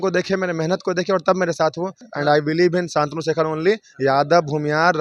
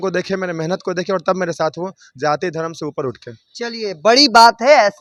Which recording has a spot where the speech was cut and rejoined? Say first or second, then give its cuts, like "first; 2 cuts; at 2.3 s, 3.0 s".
first; 1 cut; at 2.1 s